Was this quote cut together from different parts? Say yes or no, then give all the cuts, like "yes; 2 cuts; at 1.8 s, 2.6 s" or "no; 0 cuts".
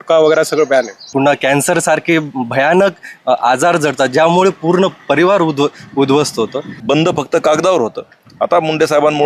yes; 2 cuts; at 1.0 s, 6.8 s